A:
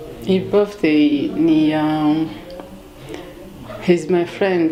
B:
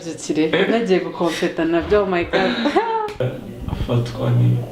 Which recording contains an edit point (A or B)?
B